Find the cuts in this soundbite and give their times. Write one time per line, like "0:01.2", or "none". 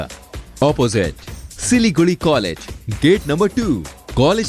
none